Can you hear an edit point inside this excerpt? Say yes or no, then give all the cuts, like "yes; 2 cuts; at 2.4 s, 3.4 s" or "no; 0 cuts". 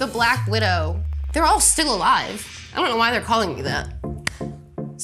yes; 1 cut; at 1.1 s